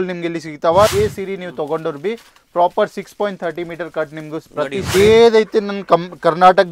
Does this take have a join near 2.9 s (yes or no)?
no